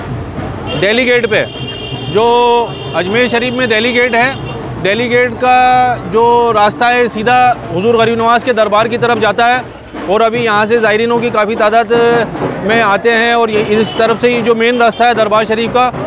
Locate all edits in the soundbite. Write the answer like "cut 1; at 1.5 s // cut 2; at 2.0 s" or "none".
none